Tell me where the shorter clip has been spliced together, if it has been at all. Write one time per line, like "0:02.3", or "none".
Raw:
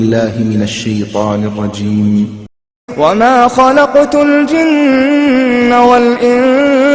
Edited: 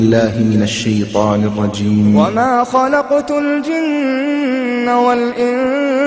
0:02.3